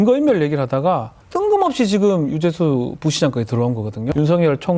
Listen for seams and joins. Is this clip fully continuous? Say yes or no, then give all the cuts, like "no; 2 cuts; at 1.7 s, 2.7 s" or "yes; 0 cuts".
no; 2 cuts; at 1.2 s, 4.1 s